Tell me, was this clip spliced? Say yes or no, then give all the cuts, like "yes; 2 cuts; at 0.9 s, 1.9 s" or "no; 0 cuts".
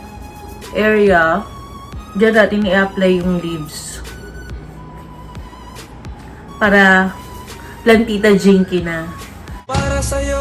no; 0 cuts